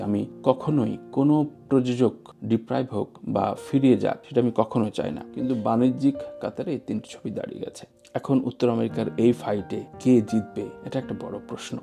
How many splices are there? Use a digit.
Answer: 1